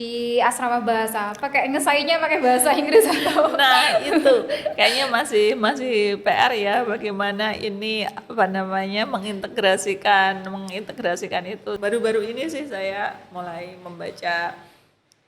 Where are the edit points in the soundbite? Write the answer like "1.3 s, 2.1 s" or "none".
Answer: 11.8 s